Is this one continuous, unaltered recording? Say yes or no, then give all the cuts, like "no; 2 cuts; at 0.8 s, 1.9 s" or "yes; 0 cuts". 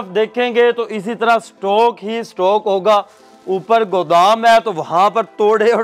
yes; 0 cuts